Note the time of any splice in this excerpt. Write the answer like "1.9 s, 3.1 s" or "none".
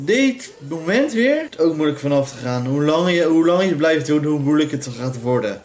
1.5 s